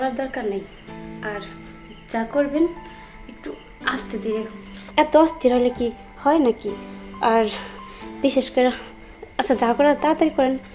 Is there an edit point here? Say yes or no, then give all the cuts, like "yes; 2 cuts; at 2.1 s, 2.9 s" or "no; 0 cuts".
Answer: yes; 1 cut; at 4.8 s